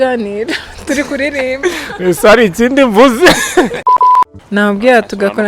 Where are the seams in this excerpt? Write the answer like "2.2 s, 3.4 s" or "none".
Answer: 3.9 s